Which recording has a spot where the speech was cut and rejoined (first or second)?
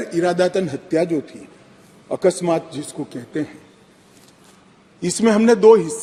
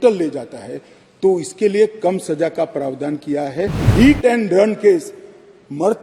second